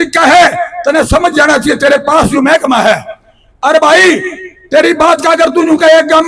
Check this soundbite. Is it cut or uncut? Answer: uncut